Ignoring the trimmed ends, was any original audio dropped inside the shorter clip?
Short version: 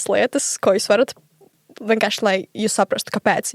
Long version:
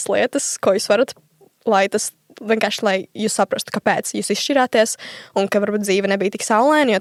yes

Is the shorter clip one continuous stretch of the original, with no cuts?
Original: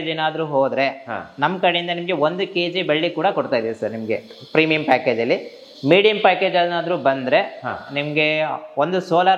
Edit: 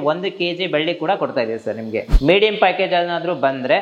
no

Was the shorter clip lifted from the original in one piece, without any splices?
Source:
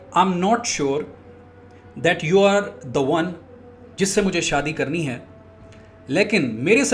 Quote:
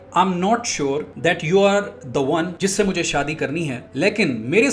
no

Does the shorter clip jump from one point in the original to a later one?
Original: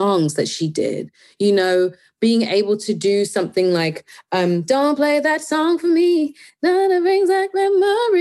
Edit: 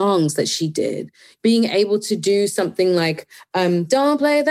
yes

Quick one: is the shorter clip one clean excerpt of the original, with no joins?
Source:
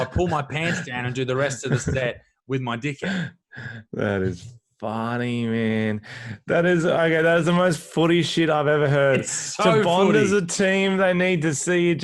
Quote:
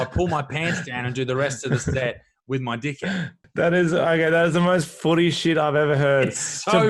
no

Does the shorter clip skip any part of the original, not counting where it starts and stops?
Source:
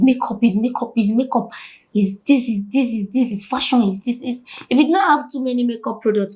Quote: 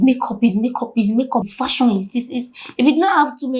yes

